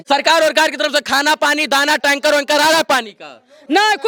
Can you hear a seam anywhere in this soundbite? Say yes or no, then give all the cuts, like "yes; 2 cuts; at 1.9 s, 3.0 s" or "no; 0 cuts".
no; 0 cuts